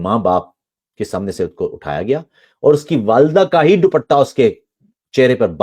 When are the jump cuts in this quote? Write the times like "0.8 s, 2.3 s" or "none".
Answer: none